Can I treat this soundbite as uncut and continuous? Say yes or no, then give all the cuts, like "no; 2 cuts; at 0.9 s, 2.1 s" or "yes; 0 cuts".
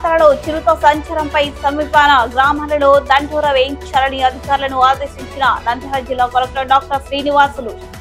yes; 0 cuts